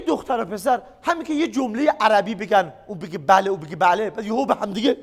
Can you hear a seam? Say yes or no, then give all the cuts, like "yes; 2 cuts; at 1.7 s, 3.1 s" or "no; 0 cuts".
no; 0 cuts